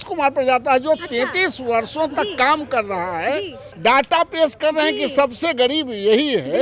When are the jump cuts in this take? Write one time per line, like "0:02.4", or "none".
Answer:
0:03.6